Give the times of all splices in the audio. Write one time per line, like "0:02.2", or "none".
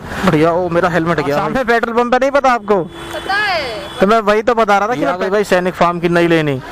0:01.4
0:05.2